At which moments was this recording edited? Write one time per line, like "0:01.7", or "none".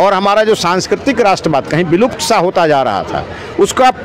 none